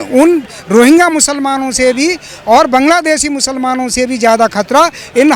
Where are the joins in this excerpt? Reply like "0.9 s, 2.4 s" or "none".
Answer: none